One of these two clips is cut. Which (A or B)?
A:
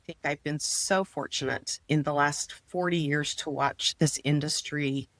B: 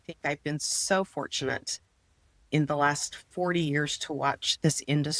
A